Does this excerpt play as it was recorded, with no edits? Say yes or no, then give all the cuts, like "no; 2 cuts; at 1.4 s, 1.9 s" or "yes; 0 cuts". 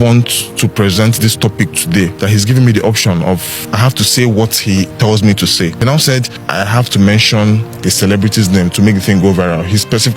no; 4 cuts; at 2.1 s, 3.6 s, 6.1 s, 7.7 s